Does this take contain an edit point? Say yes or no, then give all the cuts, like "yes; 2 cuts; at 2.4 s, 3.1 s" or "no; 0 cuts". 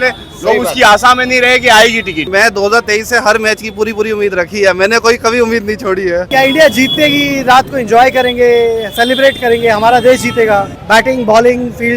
yes; 3 cuts; at 2.3 s, 6.3 s, 10.7 s